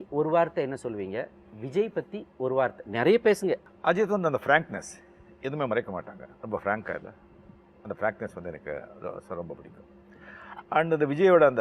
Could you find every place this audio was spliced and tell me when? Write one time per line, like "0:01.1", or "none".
0:03.7